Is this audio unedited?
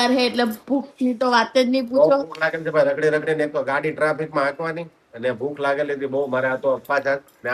yes; 0 cuts

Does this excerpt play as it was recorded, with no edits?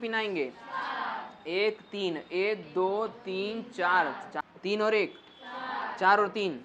no; 1 cut; at 4.3 s

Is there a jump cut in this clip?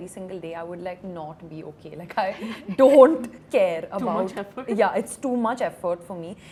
no; 0 cuts

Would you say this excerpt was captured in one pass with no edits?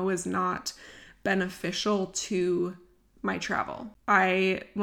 no; 1 cut; at 3.9 s

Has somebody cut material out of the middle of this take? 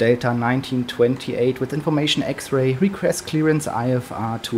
no; 0 cuts

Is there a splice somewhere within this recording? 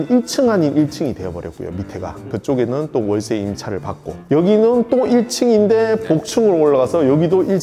no; 0 cuts

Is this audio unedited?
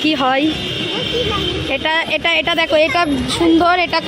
yes; 0 cuts

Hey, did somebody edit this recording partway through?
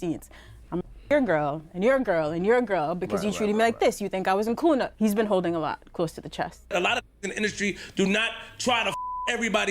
yes; 1 cut; at 6.7 s

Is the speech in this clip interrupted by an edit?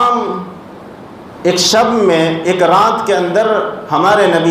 no; 0 cuts

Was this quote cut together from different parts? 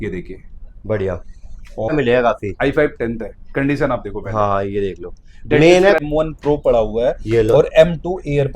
yes; 2 cuts; at 1.9 s, 6.0 s

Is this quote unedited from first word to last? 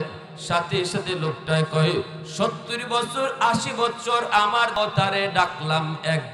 no; 1 cut; at 4.7 s

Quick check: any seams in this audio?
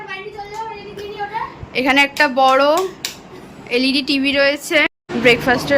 yes; 1 cut; at 4.8 s

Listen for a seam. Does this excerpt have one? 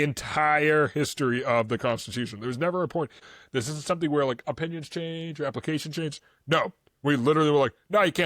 yes; 1 cut; at 3.2 s

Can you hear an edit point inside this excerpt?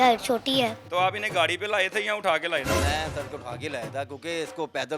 yes; 2 cuts; at 0.8 s, 2.9 s

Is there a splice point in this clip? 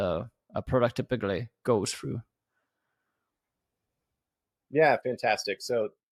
no; 0 cuts

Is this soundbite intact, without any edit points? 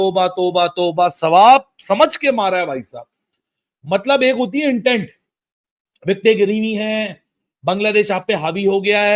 yes; 0 cuts

